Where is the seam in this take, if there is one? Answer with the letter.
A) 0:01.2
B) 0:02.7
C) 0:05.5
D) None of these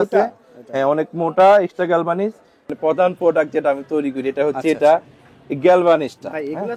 B